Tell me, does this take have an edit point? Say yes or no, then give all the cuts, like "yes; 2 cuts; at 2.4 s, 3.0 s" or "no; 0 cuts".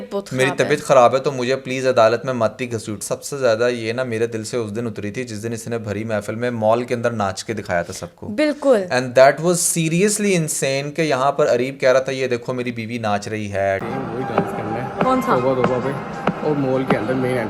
yes; 1 cut; at 2.9 s